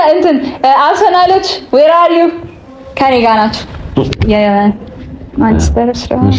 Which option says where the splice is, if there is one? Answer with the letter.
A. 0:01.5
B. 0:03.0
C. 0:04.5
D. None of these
D